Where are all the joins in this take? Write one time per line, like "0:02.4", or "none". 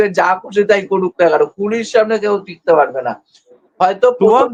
none